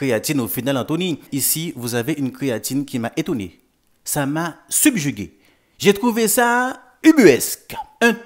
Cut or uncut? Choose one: cut